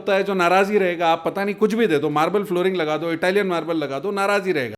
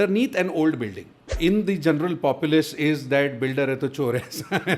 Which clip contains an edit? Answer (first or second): second